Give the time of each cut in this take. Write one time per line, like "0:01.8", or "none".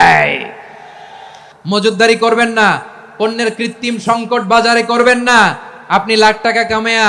0:01.4